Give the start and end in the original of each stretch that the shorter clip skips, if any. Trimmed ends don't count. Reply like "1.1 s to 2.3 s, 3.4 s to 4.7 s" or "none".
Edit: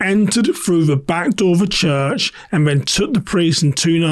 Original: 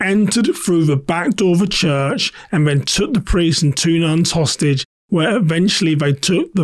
none